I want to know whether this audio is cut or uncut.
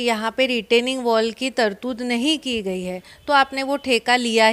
uncut